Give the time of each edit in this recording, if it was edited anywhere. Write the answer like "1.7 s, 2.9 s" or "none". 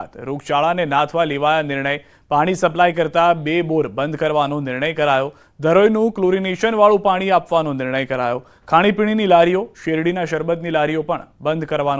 none